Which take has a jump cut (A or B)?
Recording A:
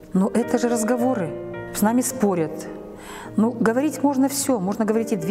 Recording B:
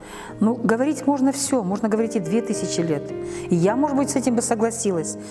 A